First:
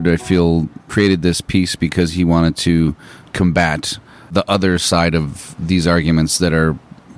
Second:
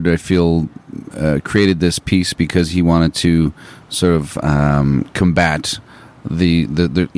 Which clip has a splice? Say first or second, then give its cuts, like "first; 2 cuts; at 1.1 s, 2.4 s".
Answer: first; 3 cuts; at 0.9 s, 3.3 s, 4.3 s